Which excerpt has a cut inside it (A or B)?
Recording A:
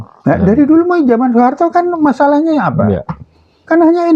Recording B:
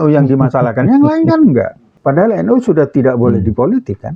B